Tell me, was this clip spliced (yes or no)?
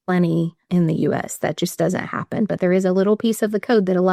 no